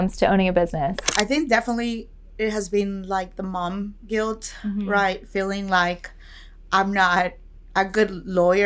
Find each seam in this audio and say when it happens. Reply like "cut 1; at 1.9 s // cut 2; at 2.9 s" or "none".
cut 1; at 1.0 s